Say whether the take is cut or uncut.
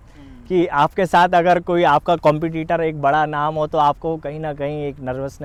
uncut